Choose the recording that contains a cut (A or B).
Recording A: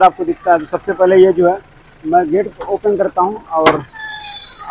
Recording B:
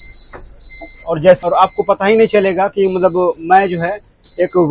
B